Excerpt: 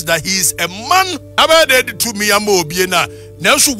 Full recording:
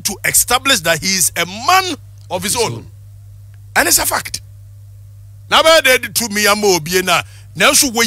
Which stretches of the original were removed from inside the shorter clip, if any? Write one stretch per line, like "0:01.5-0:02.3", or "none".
0:02.0-0:05.4